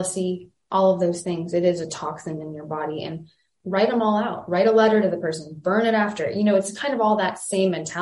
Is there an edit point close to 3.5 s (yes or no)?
yes